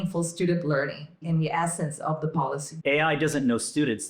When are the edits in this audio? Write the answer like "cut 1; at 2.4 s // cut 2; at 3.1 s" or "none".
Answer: cut 1; at 2.7 s